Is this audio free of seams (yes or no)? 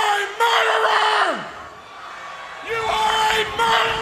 yes